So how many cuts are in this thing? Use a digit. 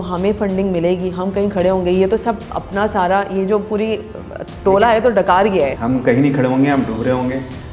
1